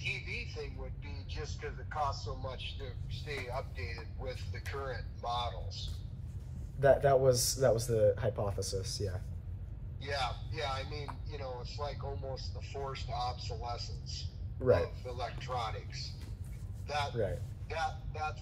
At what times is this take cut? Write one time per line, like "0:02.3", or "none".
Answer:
none